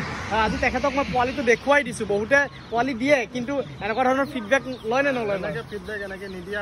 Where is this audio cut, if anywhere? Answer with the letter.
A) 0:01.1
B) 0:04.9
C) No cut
C